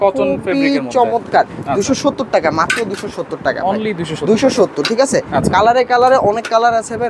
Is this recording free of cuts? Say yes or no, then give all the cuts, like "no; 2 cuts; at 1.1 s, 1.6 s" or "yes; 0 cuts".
yes; 0 cuts